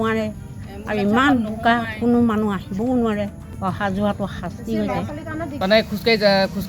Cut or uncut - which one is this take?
cut